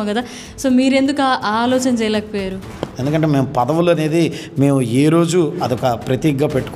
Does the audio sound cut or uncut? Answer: cut